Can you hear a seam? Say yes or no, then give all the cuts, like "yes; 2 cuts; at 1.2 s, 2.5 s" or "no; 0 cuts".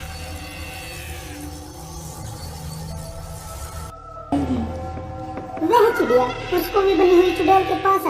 yes; 1 cut; at 4.3 s